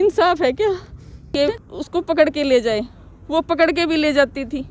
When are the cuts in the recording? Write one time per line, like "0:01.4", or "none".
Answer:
0:01.4